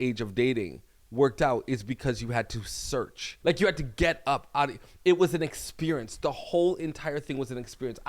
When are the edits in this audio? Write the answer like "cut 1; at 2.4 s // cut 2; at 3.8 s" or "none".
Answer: cut 1; at 3.2 s